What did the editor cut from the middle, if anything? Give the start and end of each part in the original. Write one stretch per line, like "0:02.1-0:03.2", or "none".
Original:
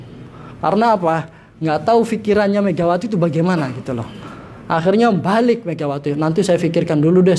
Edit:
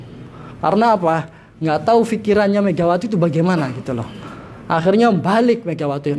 none